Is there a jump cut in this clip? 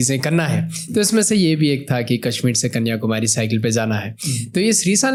no; 0 cuts

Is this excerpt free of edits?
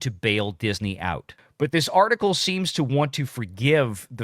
no; 1 cut; at 1.3 s

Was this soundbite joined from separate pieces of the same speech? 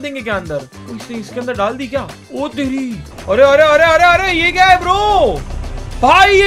yes; 1 cut; at 3.1 s

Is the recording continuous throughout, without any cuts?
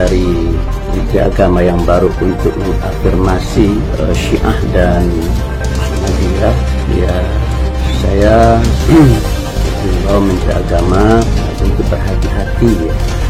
yes; 0 cuts

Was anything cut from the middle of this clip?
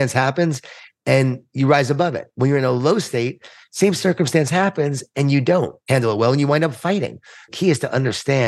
yes; 2 cuts; at 5.8 s, 7.5 s

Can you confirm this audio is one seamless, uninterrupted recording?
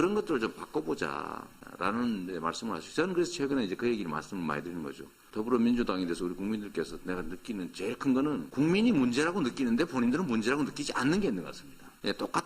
yes; 0 cuts

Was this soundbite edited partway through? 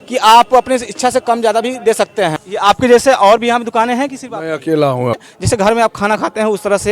yes; 2 cuts; at 2.4 s, 5.2 s

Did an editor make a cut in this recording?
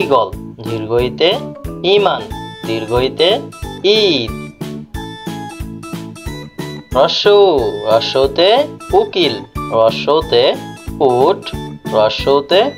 yes; 2 cuts; at 4.5 s, 6.9 s

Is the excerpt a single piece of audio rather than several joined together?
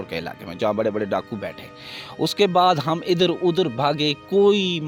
yes; 0 cuts

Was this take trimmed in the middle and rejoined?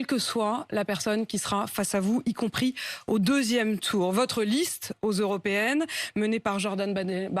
yes; 1 cut; at 2.8 s

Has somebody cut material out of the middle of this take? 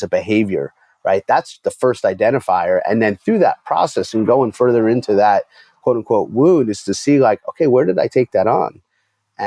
no; 0 cuts

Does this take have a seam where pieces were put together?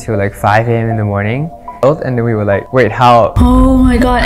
yes; 1 cut; at 1.4 s

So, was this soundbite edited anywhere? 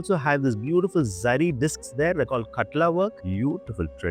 yes; 1 cut; at 3.2 s

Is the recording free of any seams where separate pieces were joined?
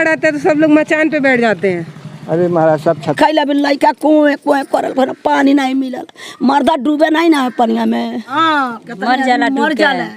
no; 2 cuts; at 3.1 s, 8.4 s

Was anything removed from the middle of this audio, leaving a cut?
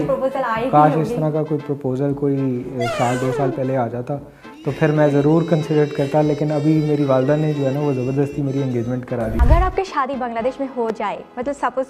yes; 1 cut; at 9.4 s

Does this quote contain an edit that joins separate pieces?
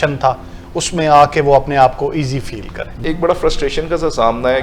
yes; 1 cut; at 2.9 s

